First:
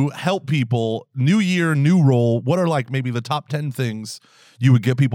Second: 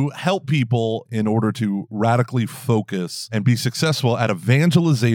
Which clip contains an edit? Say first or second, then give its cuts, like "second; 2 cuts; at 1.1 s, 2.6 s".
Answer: second; 2 cuts; at 1.1 s, 3.3 s